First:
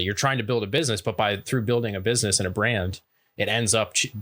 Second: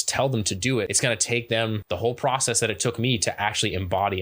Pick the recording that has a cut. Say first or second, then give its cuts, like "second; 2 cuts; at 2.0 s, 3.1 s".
second; 2 cuts; at 0.9 s, 1.8 s